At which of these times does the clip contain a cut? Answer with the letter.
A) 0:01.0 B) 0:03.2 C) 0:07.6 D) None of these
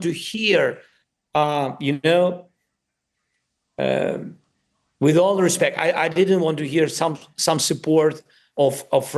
D